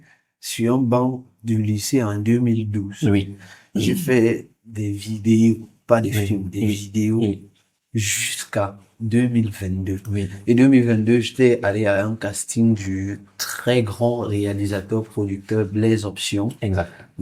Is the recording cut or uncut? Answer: uncut